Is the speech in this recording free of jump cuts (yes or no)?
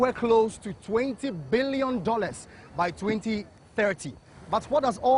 yes